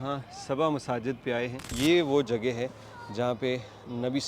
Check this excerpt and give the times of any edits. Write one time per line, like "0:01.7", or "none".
0:01.7